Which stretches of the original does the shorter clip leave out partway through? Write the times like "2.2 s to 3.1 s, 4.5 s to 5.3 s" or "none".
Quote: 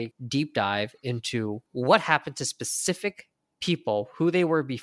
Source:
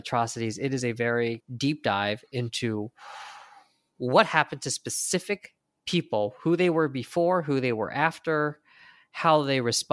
2.9 s to 3.9 s